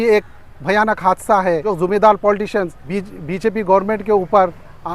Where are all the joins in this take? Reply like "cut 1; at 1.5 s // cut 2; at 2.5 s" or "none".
cut 1; at 1.7 s // cut 2; at 2.8 s